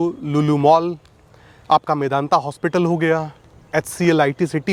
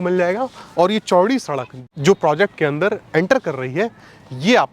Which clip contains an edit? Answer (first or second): second